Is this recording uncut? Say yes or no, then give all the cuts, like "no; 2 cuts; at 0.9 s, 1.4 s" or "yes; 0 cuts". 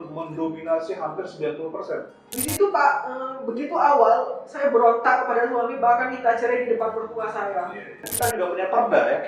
no; 2 cuts; at 2.3 s, 8.0 s